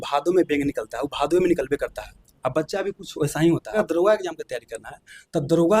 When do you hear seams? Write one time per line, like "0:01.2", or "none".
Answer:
0:03.7